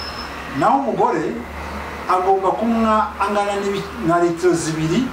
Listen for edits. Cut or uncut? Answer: uncut